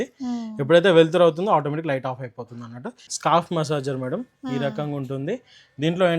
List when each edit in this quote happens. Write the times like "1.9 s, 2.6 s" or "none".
3.1 s